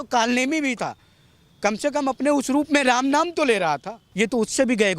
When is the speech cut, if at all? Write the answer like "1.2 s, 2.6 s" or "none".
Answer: 4.0 s